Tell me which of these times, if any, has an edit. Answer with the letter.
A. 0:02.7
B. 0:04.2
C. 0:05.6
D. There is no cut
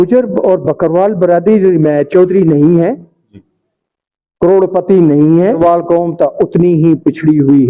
C